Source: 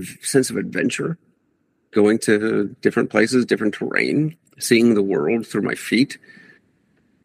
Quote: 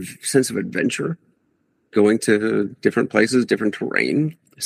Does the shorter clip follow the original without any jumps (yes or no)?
yes